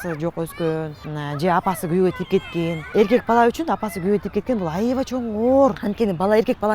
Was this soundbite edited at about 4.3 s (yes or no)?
no